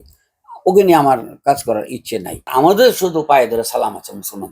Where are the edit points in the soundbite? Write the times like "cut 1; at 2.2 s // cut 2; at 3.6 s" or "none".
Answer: cut 1; at 2.5 s